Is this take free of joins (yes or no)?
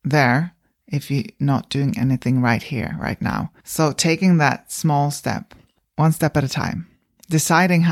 yes